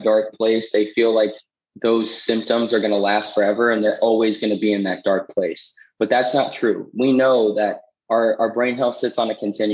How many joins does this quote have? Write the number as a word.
zero